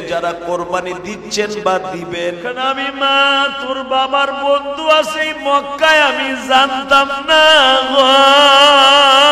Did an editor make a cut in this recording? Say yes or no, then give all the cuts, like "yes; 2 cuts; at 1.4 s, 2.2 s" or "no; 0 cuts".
yes; 1 cut; at 2.5 s